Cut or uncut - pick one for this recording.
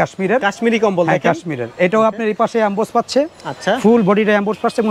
uncut